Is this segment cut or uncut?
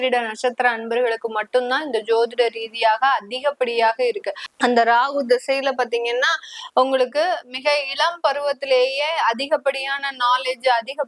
cut